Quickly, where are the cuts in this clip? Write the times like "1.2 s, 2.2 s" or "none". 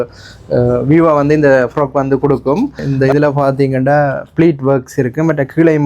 2.8 s